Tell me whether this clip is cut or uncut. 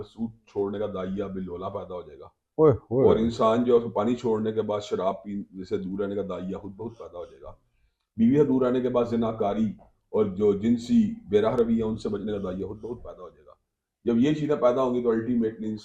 uncut